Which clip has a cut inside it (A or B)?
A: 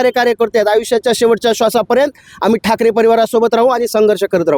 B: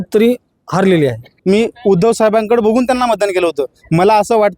B